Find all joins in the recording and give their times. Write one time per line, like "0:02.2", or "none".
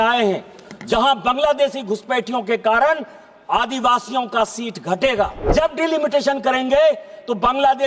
0:05.5